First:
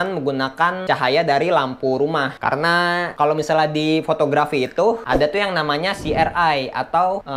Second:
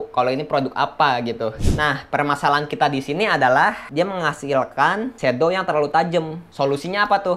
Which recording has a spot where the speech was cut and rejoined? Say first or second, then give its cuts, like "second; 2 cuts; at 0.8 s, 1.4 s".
second; 2 cuts; at 1.7 s, 3.8 s